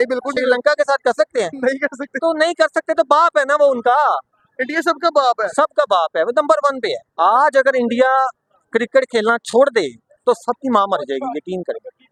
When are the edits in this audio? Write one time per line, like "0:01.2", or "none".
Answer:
none